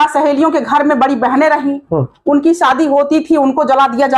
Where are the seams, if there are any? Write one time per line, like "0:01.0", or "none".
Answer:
none